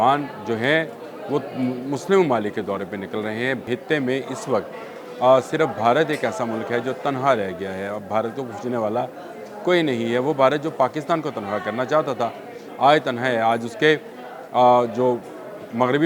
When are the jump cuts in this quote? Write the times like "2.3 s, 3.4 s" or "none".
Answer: 3.6 s